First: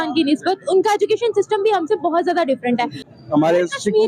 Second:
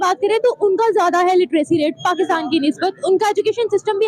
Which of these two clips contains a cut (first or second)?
first